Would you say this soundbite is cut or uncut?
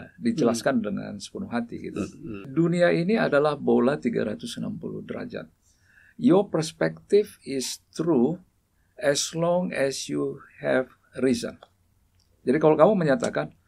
cut